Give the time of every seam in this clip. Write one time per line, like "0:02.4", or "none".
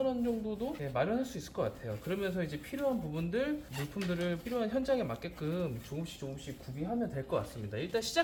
none

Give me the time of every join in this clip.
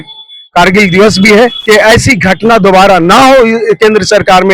0:01.6

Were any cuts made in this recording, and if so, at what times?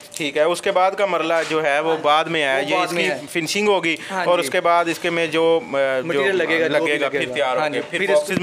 none

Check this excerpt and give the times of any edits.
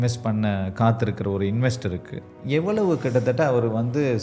0:02.3

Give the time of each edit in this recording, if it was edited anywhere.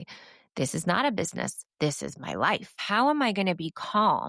0:02.8

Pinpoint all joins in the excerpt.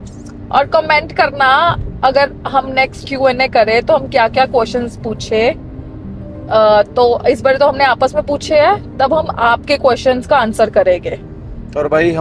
none

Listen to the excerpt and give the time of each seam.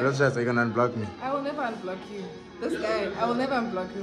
none

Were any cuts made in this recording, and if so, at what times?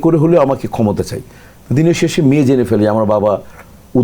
none

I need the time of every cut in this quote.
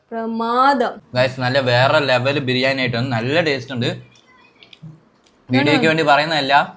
0:01.0

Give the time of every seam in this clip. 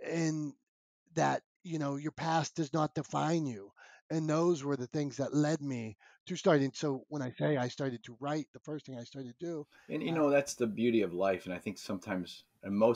0:09.8

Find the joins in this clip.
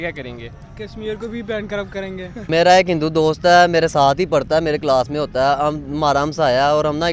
0:02.5

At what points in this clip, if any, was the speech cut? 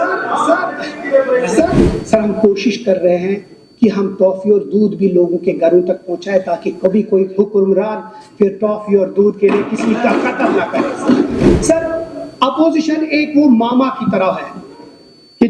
0:01.8
0:11.6

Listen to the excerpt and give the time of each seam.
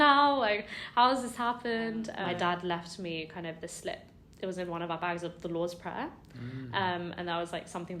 0:02.2

